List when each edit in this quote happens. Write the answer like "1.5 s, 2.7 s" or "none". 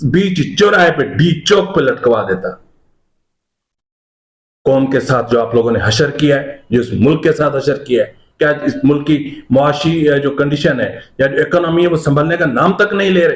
none